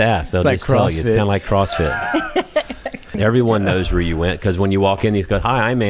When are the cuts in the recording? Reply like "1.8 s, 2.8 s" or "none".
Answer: 3.1 s